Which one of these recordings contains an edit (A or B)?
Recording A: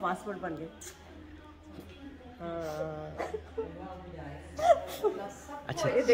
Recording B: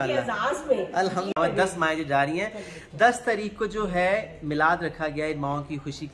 B